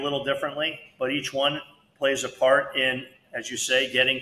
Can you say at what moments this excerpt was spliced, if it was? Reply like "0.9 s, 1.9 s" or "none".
none